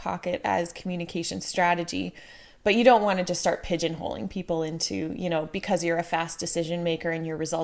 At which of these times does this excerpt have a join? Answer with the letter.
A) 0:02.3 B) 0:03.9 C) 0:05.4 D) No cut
D